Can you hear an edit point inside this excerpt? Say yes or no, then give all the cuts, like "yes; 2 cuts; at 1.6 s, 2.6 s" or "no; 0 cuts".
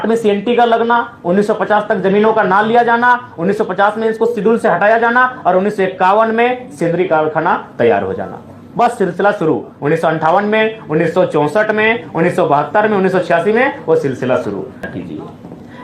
yes; 1 cut; at 14.9 s